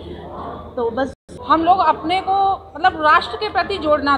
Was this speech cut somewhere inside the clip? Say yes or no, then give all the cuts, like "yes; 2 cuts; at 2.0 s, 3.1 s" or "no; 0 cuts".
yes; 1 cut; at 1.2 s